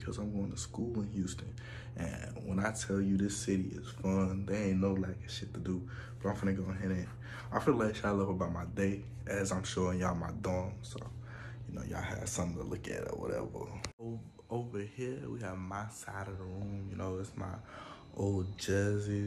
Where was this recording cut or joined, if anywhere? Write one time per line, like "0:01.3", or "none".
0:13.9